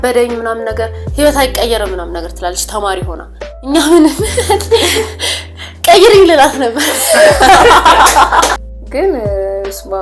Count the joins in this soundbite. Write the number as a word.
one